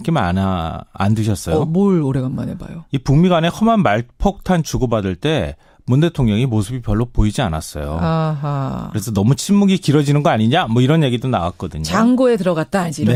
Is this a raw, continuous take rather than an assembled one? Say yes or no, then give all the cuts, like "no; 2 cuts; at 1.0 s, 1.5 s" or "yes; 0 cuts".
yes; 0 cuts